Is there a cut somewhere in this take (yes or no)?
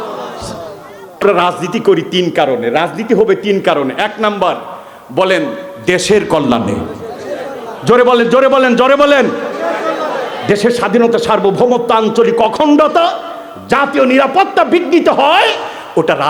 yes